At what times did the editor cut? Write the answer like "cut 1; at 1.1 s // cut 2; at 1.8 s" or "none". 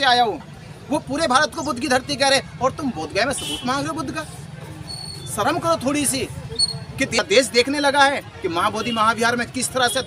cut 1; at 7.2 s